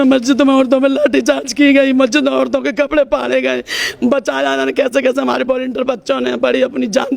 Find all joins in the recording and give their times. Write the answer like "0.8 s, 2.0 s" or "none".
none